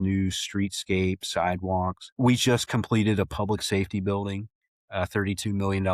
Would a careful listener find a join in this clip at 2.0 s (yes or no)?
yes